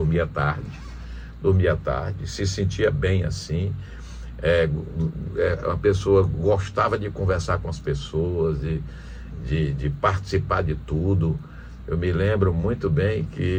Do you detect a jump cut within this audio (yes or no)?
no